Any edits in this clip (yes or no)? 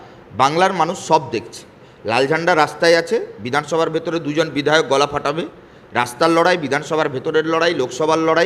no